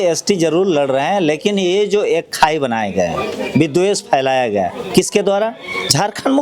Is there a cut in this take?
no; 0 cuts

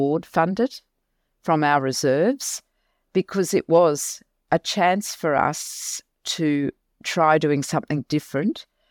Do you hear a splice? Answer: no; 0 cuts

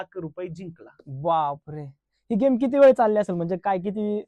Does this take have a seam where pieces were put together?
no; 0 cuts

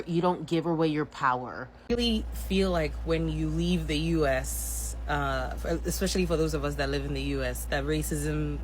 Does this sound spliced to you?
yes; 1 cut; at 1.9 s

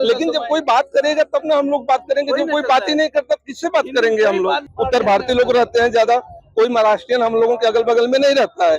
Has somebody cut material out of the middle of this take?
yes; 1 cut; at 4.7 s

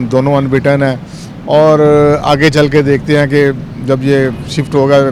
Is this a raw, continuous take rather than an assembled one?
yes; 0 cuts

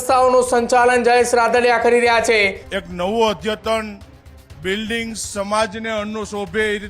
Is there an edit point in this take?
yes; 1 cut; at 2.6 s

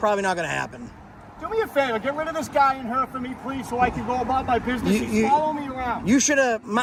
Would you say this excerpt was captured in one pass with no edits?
yes; 0 cuts

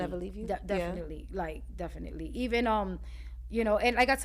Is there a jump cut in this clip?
no; 0 cuts

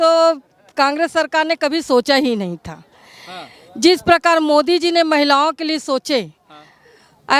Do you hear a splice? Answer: no; 0 cuts

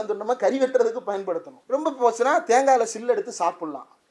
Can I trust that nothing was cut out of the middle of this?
no; 1 cut; at 1.5 s

